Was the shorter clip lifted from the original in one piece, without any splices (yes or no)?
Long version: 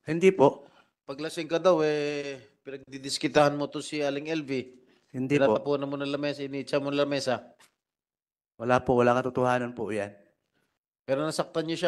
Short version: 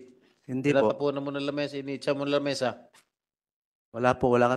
yes